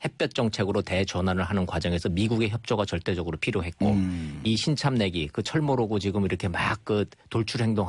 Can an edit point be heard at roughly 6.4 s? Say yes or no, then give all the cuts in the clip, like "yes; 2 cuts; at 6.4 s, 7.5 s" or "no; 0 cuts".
no; 1 cut; at 3.4 s